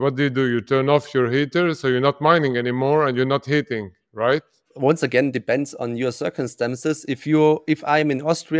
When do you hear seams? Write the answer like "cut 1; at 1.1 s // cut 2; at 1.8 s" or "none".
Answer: cut 1; at 4.6 s

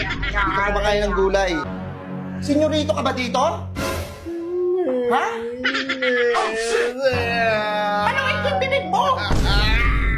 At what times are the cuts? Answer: cut 1; at 1.7 s

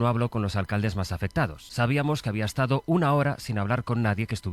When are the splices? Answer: cut 1; at 1.6 s

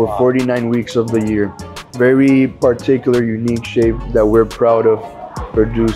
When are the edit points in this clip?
cut 1; at 1.9 s // cut 2; at 4.0 s

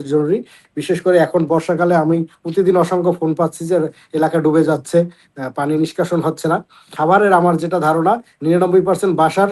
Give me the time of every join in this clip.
cut 1; at 6.8 s

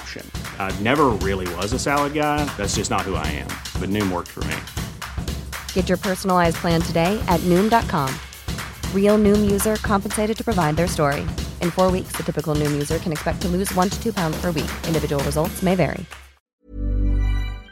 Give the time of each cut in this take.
cut 1; at 16.4 s

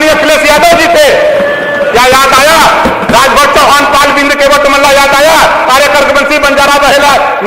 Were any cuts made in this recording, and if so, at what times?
none

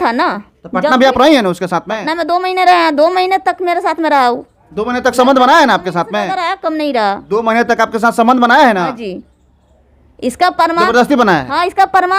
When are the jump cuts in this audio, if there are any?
none

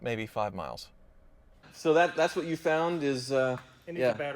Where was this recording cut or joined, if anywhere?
cut 1; at 1.7 s

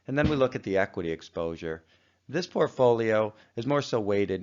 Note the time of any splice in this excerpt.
cut 1; at 1.6 s

